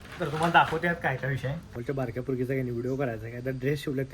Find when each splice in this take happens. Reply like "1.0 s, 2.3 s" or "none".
1.7 s